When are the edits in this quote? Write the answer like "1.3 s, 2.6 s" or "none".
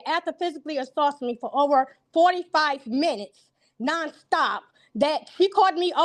none